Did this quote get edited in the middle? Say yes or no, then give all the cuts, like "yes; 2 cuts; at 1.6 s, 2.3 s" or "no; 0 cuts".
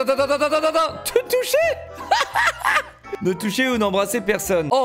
no; 0 cuts